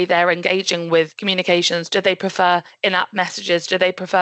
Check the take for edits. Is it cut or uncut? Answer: cut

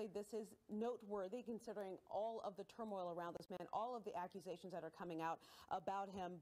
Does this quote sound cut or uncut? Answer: uncut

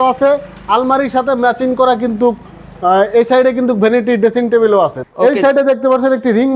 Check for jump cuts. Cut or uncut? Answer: cut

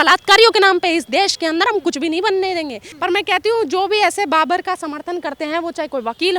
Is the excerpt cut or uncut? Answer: uncut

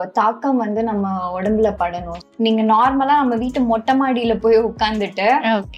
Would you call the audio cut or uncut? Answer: cut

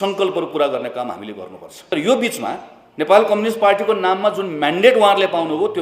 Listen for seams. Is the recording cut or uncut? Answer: cut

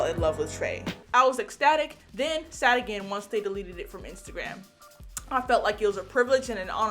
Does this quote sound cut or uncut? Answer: cut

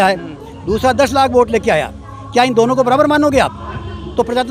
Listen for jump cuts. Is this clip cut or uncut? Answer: uncut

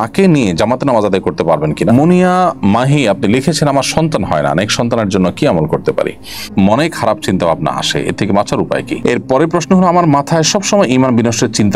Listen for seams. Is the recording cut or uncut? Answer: cut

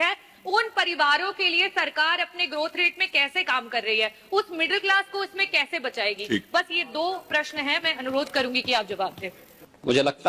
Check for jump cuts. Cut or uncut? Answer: uncut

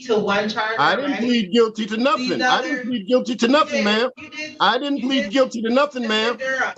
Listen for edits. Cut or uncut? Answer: uncut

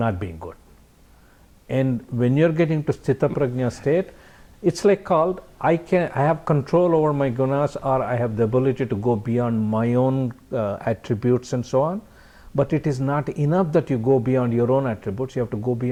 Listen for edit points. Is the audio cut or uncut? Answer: uncut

